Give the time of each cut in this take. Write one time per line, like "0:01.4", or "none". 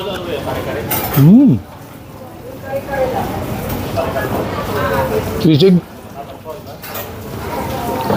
none